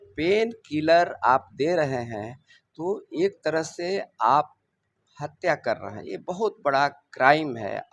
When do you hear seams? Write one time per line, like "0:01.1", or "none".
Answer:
none